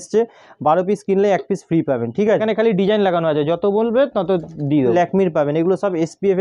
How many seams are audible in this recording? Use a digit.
2